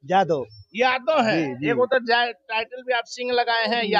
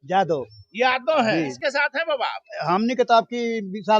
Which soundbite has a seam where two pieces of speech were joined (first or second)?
second